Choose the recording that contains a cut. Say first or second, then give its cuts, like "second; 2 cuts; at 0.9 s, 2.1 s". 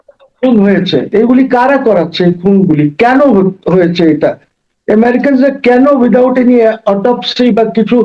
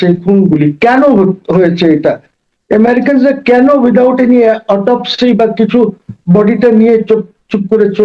first; 1 cut; at 1.1 s